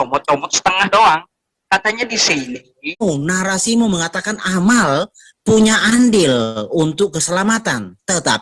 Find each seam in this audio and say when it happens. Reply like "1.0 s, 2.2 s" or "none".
3.0 s